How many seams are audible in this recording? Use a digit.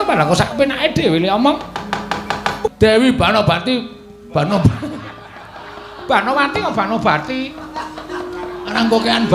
1